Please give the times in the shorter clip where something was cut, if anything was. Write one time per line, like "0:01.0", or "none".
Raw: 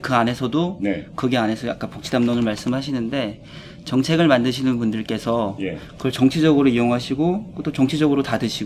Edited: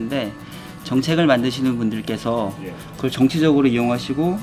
none